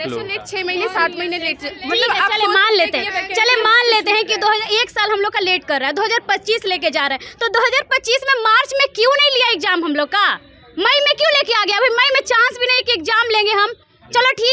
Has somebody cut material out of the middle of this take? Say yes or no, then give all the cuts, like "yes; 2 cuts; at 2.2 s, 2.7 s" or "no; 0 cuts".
no; 0 cuts